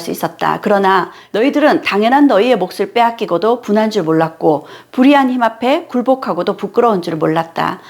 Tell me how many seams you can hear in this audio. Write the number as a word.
one